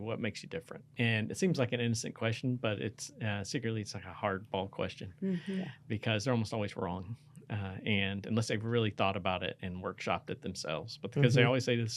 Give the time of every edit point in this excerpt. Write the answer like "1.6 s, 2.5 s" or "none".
0.9 s